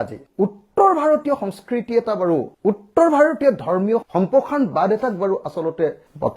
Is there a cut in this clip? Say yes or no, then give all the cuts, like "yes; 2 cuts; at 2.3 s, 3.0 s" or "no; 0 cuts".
no; 0 cuts